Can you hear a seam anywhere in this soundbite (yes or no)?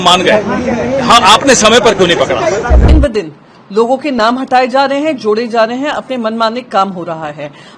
yes